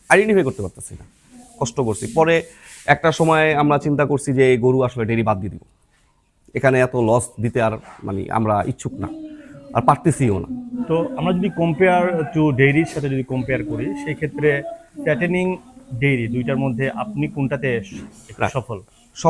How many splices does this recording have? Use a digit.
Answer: 2